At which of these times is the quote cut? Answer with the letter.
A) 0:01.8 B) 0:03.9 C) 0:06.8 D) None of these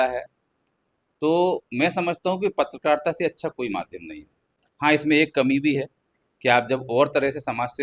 D